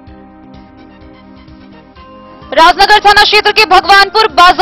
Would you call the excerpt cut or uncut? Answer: cut